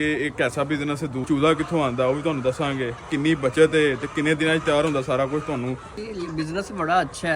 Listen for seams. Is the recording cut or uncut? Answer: cut